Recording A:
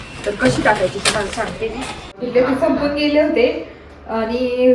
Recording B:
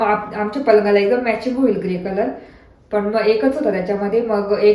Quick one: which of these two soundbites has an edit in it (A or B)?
A